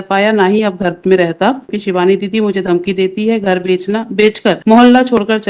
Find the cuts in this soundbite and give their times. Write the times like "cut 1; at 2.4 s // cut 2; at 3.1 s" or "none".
cut 1; at 1.8 s // cut 2; at 4.6 s

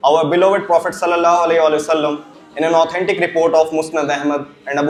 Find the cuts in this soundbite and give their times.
none

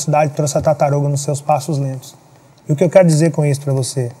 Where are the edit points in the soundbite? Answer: none

